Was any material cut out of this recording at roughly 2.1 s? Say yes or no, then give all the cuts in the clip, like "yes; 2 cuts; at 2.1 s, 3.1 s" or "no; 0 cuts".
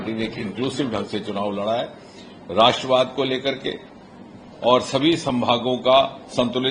no; 0 cuts